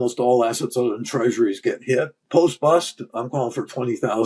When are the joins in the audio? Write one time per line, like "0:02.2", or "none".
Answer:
0:02.2